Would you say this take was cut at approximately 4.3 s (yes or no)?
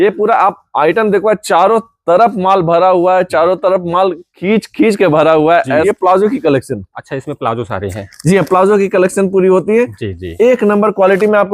yes